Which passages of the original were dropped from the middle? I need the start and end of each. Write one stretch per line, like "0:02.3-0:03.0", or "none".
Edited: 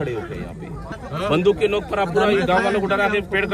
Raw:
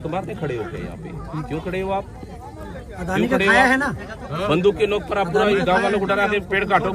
0:01.3-0:04.1